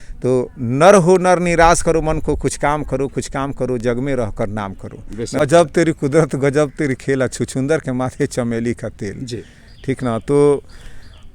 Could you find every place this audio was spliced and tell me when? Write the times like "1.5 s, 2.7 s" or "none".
5.4 s